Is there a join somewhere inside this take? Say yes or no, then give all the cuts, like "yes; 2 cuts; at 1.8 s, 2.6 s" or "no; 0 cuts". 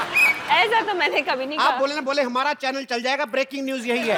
no; 0 cuts